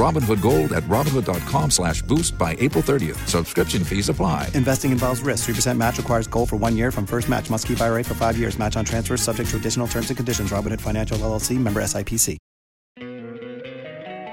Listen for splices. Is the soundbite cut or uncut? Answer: cut